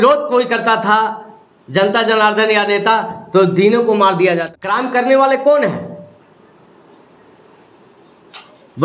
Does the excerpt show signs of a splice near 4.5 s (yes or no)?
yes